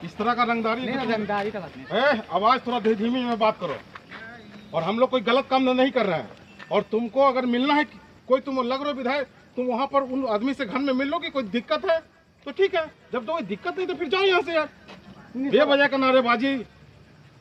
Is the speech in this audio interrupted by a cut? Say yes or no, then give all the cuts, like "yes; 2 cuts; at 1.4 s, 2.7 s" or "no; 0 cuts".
no; 0 cuts